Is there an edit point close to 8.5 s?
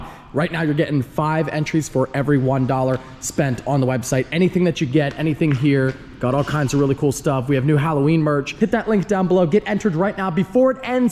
yes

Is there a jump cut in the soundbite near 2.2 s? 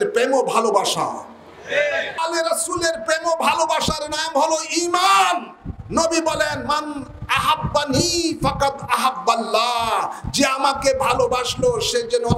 yes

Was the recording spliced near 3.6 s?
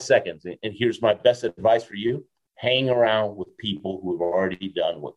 no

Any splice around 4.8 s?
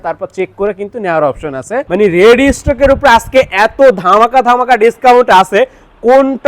no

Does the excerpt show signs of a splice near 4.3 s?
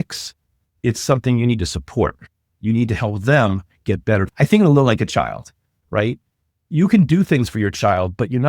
yes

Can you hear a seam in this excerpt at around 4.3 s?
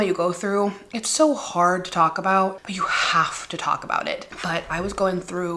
yes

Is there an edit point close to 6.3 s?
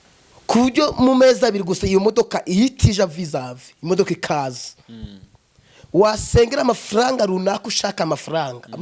no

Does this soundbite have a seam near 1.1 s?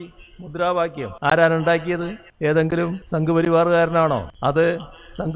yes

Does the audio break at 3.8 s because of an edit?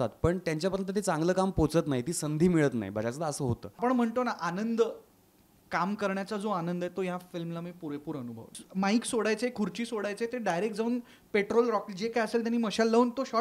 yes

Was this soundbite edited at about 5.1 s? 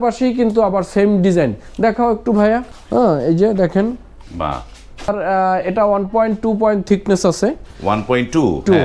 yes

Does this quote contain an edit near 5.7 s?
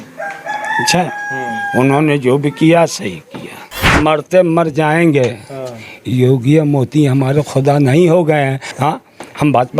no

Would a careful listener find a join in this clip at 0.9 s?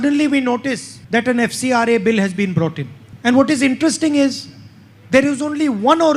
yes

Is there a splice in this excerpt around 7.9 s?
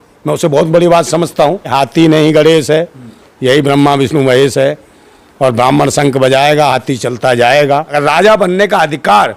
yes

